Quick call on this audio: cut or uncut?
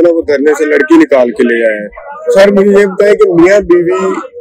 cut